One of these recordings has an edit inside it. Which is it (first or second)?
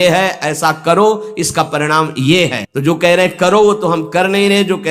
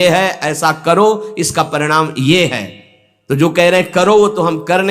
first